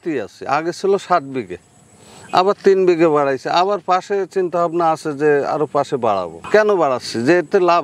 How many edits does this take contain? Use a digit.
1